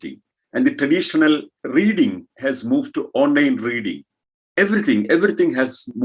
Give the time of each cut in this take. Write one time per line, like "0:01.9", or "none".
none